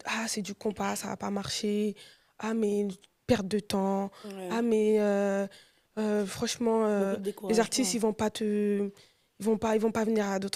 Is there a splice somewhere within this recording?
no; 0 cuts

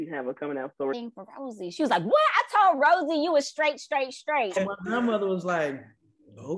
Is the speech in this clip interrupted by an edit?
yes; 2 cuts; at 0.9 s, 4.6 s

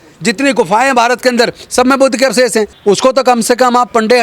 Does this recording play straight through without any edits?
no; 1 cut; at 2.7 s

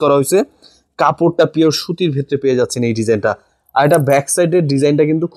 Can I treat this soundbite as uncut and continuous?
yes; 0 cuts

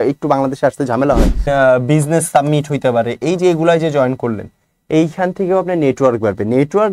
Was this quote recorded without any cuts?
no; 1 cut; at 1.5 s

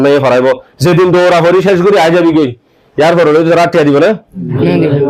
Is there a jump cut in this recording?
no; 0 cuts

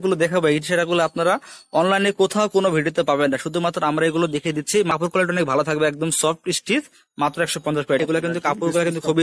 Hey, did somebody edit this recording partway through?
yes; 2 cuts; at 4.9 s, 8.0 s

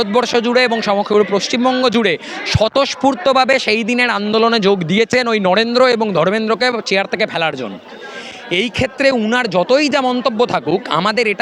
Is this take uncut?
yes; 0 cuts

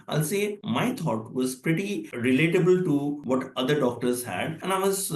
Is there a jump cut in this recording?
yes; 1 cut; at 2.1 s

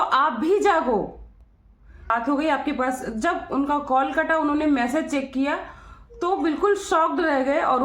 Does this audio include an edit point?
yes; 1 cut; at 2.1 s

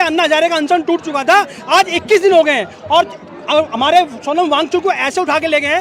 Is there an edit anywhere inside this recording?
no; 0 cuts

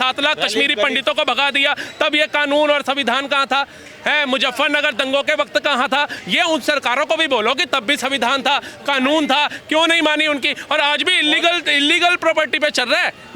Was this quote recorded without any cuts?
yes; 0 cuts

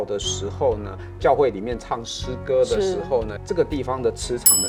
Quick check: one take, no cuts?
yes; 0 cuts

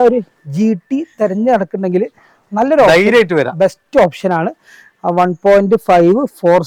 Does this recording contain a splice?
no; 0 cuts

